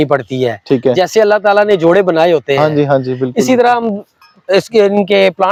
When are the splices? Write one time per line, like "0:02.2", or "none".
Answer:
none

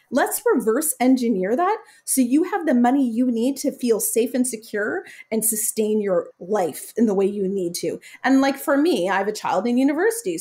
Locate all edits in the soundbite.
0:06.3

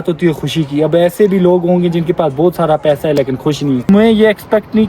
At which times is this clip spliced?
0:03.9

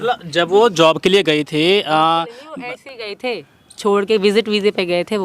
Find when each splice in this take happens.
none

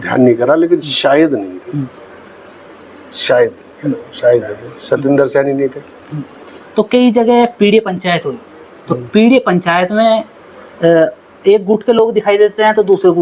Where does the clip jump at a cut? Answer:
none

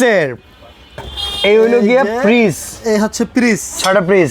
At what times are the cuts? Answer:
0:01.1

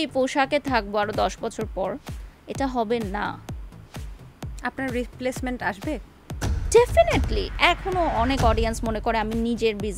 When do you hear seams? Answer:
0:07.5

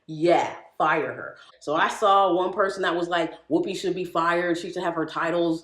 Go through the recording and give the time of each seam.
0:01.5

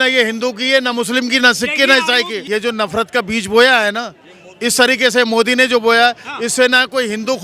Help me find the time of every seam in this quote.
0:02.4

